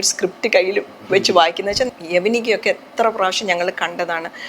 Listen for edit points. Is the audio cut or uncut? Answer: cut